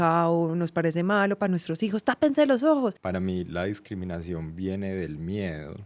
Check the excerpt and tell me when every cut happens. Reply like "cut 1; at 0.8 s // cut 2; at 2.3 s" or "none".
cut 1; at 3.0 s

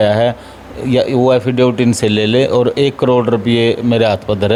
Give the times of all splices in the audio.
none

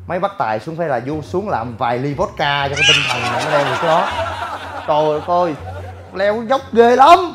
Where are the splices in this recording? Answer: none

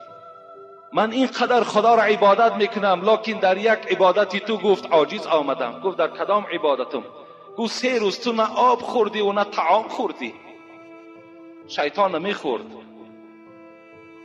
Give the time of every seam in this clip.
cut 1; at 13.1 s

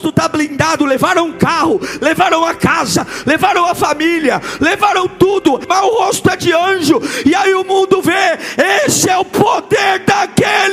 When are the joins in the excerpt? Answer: cut 1; at 5.7 s

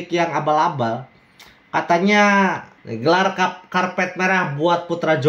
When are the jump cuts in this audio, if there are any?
cut 1; at 2.7 s

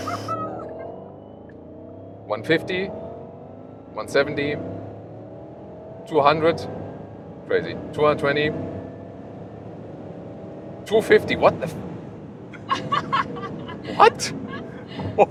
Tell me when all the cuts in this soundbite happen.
none

